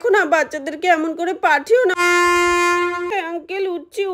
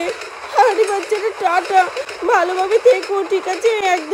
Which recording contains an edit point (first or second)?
first